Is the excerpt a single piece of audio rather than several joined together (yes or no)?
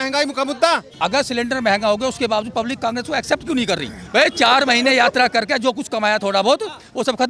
no